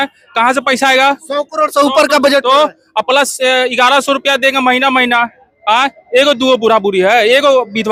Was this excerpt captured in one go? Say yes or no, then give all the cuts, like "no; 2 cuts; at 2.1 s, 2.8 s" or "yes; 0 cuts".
yes; 0 cuts